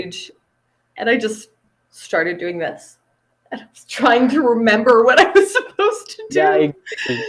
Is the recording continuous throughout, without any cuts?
yes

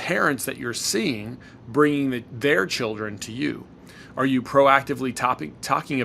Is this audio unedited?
yes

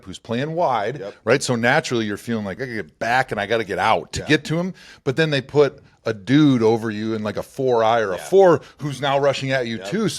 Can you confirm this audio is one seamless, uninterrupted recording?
no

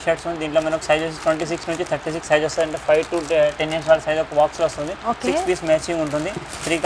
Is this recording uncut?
yes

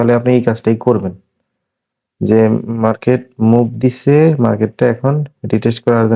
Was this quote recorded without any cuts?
yes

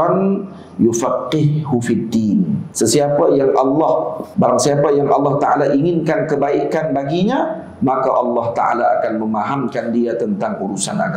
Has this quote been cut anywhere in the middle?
yes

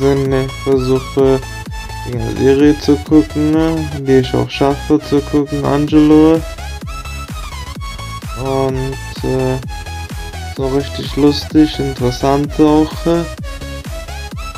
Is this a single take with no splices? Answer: yes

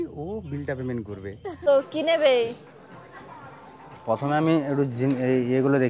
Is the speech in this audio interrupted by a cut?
yes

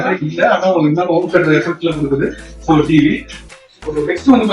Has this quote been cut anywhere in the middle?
yes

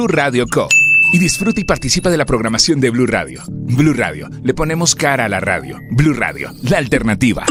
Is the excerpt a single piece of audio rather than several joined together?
yes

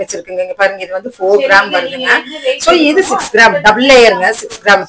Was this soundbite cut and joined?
no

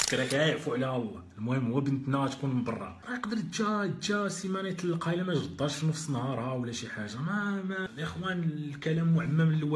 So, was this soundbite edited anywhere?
yes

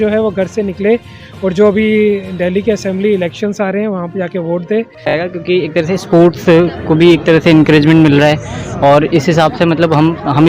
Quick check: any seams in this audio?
yes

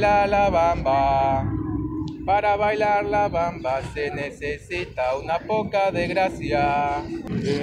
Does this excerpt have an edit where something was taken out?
no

